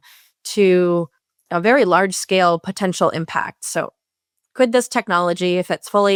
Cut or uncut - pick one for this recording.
uncut